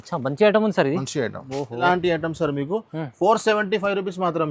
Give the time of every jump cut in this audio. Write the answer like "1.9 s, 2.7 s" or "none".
1.8 s